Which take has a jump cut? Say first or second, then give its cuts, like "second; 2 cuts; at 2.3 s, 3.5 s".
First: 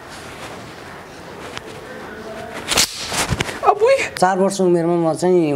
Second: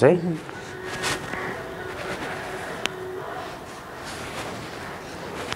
first; 1 cut; at 4.2 s